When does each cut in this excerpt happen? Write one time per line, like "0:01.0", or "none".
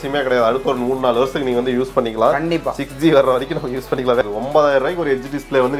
0:04.2